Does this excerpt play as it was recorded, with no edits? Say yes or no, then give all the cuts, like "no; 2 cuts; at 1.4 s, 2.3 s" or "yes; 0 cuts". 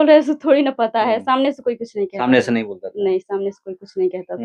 yes; 0 cuts